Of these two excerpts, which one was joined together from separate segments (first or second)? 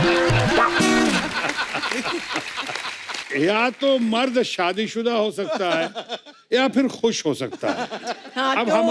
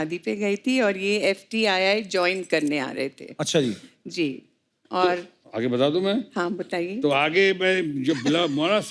first